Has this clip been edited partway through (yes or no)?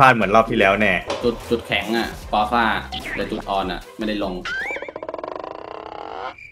no